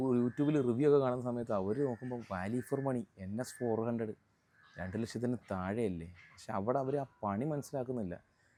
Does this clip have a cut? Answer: no; 0 cuts

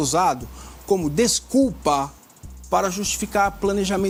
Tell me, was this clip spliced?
no; 0 cuts

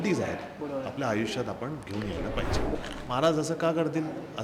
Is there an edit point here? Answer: yes; 1 cut; at 2.7 s

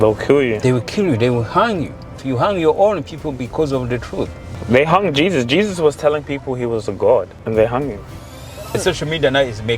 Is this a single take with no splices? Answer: no; 4 cuts; at 2.2 s, 4.5 s, 7.4 s, 8.8 s

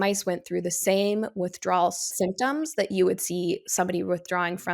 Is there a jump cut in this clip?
yes; 1 cut; at 2.1 s

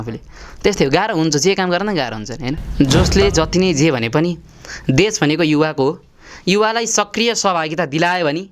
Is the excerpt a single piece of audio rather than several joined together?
no; 1 cut; at 2.6 s

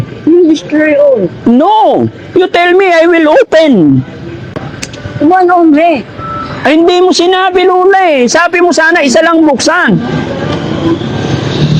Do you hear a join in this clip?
no; 0 cuts

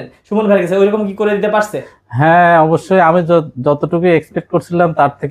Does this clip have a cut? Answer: no; 0 cuts

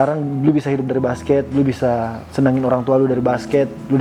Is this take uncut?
yes; 0 cuts

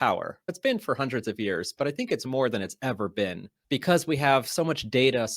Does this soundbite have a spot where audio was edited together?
yes; 1 cut; at 3.5 s

